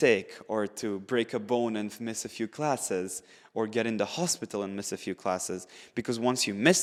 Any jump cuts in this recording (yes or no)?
no